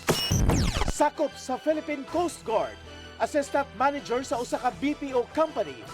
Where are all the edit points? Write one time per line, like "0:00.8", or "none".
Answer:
0:00.9